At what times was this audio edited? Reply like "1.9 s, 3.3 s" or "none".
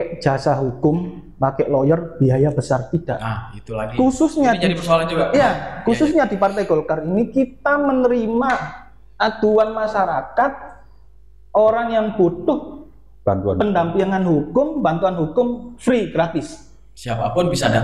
none